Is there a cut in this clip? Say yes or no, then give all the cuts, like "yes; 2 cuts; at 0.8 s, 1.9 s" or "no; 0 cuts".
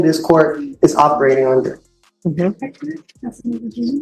no; 0 cuts